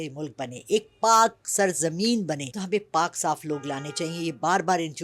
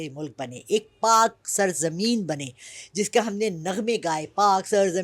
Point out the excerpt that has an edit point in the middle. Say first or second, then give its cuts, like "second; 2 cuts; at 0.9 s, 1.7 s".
first; 1 cut; at 2.5 s